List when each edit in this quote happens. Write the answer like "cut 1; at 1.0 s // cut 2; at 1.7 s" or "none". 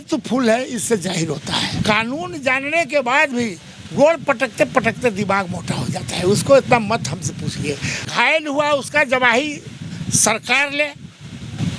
cut 1; at 1.7 s // cut 2; at 8.1 s